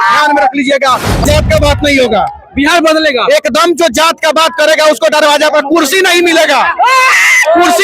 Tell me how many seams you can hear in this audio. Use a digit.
1